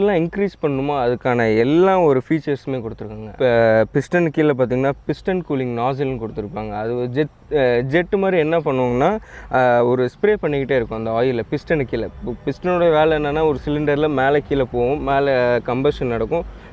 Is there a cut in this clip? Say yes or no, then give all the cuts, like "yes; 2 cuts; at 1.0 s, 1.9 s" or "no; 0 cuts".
no; 0 cuts